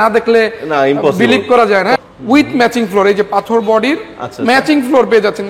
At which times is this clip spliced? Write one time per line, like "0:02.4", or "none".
0:02.0